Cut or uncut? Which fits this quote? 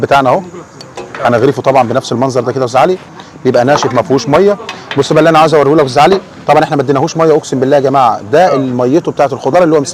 uncut